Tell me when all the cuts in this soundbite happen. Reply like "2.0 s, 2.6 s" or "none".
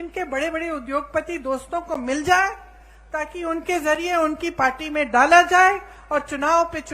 none